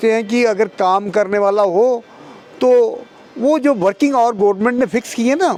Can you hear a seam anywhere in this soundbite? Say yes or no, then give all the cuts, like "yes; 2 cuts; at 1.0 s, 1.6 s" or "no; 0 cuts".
no; 0 cuts